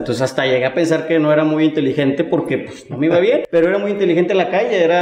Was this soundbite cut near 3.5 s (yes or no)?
yes